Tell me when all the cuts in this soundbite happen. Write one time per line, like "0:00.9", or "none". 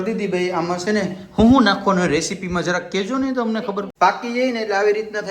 0:03.9